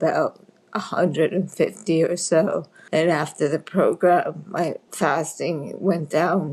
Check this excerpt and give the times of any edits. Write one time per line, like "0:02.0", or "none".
none